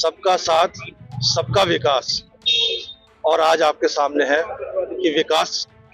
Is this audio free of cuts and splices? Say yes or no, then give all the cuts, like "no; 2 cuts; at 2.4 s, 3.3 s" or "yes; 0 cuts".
yes; 0 cuts